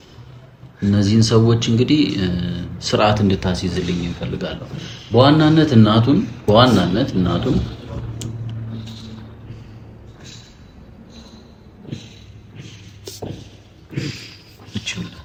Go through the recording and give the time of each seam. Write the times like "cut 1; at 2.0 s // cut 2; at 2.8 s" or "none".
none